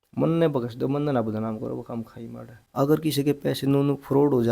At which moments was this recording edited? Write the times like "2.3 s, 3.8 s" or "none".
2.6 s